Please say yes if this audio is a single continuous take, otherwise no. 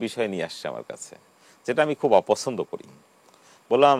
yes